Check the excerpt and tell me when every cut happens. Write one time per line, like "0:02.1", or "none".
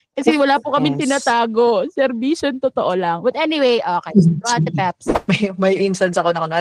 0:05.1